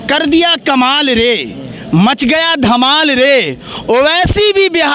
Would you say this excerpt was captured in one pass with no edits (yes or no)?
yes